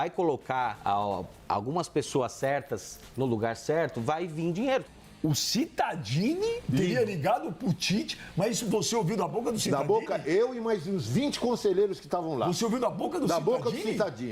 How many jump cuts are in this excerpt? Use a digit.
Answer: 3